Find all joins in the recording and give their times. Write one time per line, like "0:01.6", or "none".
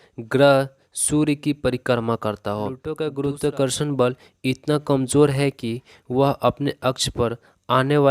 0:02.9